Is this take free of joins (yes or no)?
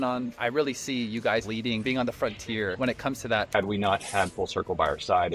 no